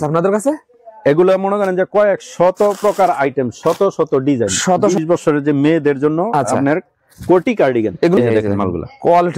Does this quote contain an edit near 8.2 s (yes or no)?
yes